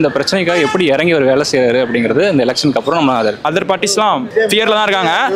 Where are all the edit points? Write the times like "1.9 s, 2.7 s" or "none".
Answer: 3.4 s, 4.3 s